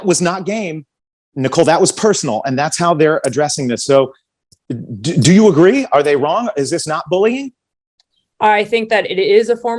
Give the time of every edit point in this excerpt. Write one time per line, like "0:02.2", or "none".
none